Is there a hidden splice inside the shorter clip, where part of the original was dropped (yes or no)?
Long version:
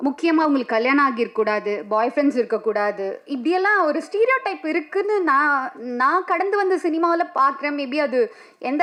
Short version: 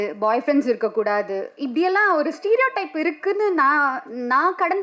no